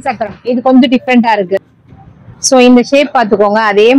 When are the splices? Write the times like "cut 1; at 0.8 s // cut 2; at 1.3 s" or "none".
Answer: cut 1; at 1.6 s